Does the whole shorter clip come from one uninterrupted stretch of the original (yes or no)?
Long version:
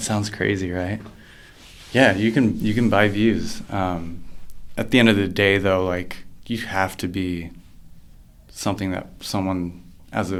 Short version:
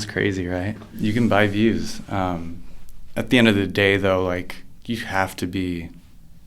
no